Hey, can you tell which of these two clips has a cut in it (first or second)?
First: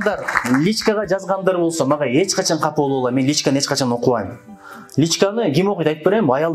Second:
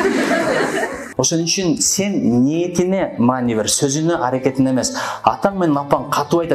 second